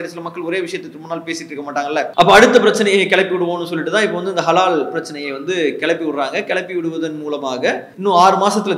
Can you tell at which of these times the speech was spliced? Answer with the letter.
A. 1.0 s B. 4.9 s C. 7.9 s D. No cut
C